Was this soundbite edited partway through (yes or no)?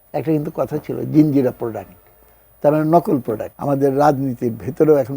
yes